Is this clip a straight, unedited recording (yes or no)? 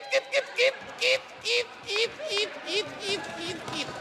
yes